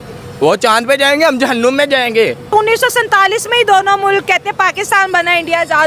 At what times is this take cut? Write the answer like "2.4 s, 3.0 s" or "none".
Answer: 2.5 s